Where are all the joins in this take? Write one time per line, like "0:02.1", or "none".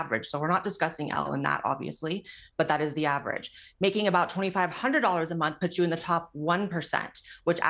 none